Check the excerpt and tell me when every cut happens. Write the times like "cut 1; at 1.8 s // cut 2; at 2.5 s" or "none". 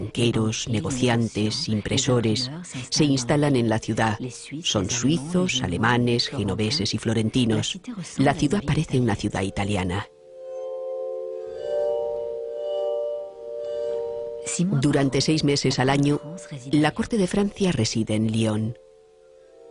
cut 1; at 1.5 s